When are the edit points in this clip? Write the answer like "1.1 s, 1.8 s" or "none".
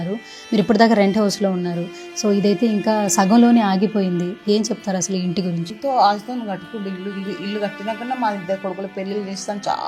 5.7 s